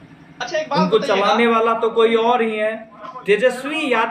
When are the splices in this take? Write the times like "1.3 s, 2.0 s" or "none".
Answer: 2.9 s